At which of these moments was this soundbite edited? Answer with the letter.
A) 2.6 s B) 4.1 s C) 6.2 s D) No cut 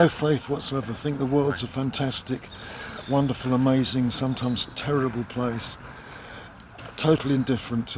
D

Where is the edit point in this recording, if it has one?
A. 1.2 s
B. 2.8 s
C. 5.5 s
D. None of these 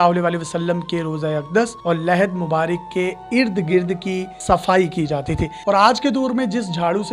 C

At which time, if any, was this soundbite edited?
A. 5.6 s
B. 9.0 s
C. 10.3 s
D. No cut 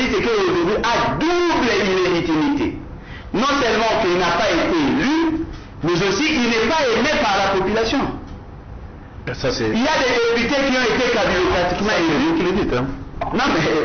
D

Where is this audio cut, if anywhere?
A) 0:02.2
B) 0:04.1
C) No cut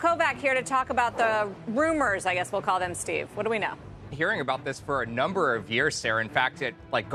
B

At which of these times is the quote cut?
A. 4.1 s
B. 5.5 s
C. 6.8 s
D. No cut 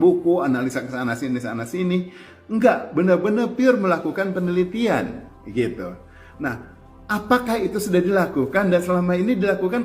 D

